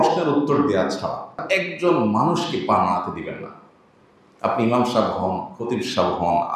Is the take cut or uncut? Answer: cut